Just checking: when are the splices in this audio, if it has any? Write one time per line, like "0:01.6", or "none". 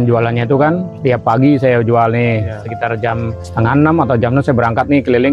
0:00.9
0:03.4